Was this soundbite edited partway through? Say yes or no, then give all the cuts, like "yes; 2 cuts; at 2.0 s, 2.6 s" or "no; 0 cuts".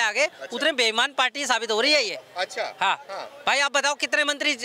no; 0 cuts